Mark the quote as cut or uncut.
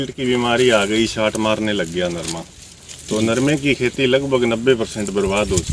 uncut